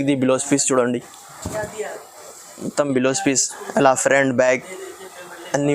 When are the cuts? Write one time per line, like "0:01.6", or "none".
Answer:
none